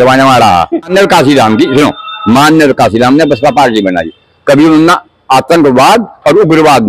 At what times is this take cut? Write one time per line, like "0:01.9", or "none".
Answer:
0:00.9